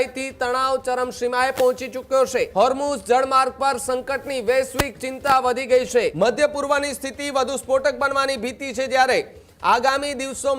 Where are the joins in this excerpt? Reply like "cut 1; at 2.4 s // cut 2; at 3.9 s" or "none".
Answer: cut 1; at 2.5 s // cut 2; at 6.1 s